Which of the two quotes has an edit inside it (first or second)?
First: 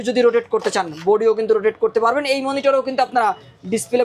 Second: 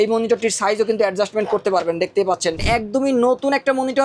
second